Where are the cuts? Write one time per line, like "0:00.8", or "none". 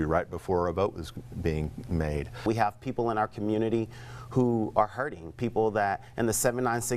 0:02.4